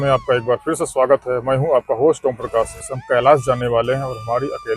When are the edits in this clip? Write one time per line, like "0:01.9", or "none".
0:03.0